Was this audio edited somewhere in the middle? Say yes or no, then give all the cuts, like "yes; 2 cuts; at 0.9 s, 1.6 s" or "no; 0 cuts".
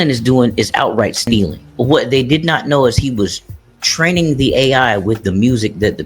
yes; 1 cut; at 1.6 s